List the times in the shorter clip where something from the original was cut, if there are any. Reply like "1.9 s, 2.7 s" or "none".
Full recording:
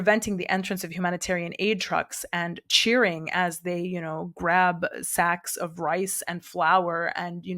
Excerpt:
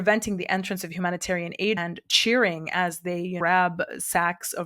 1.8 s, 3.4 s